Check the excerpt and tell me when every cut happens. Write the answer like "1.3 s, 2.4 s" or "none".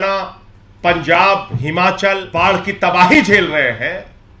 2.3 s